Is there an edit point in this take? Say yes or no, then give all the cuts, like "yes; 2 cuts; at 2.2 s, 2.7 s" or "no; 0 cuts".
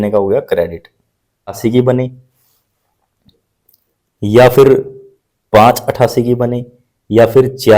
yes; 1 cut; at 1.6 s